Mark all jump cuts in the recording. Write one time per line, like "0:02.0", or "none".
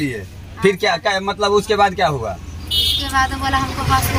none